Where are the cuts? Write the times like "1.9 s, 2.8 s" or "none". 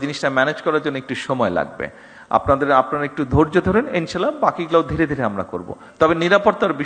none